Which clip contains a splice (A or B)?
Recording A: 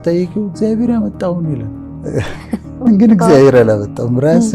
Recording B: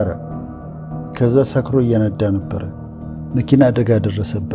A